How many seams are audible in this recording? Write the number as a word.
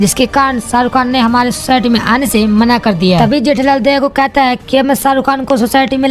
one